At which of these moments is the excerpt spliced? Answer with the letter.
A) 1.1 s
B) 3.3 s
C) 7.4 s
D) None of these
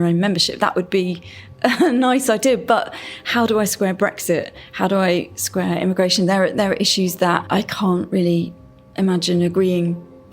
C